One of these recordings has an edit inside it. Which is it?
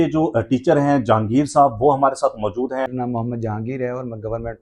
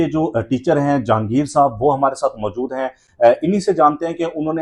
first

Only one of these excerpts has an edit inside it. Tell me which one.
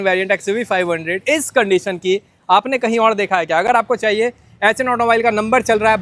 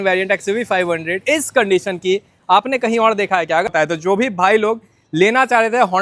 second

